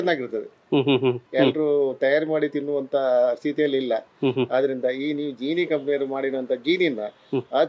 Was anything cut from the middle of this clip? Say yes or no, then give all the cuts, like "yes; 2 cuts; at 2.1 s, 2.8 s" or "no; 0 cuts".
yes; 1 cut; at 1.2 s